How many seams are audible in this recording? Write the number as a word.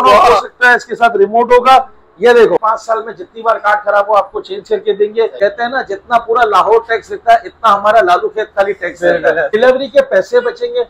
three